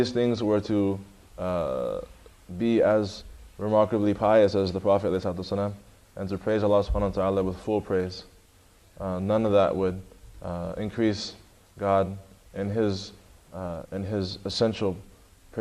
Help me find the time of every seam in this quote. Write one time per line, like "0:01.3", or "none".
none